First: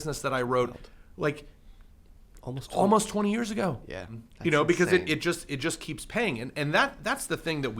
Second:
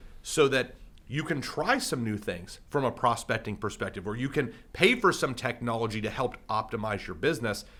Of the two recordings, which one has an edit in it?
first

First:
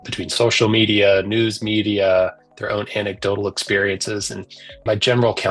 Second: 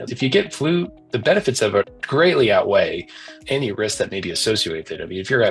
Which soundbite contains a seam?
second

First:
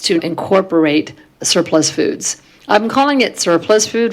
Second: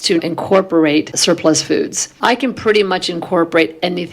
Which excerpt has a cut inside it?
second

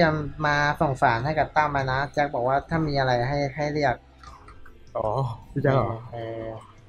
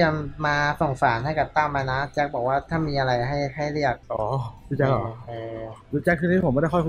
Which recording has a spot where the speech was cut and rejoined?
second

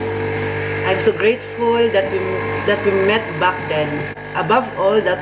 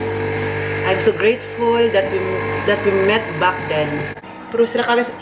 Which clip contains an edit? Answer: second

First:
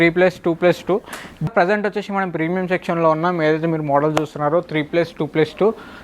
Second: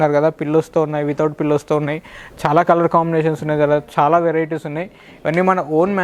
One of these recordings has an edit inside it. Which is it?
first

